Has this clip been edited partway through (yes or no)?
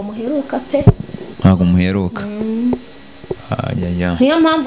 no